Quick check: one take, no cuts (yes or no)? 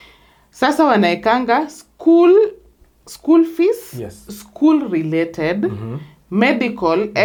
yes